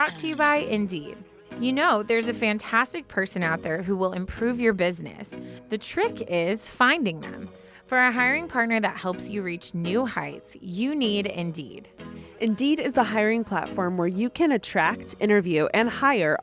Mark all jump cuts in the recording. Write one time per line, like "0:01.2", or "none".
none